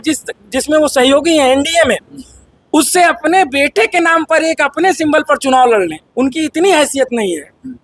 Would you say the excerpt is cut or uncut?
uncut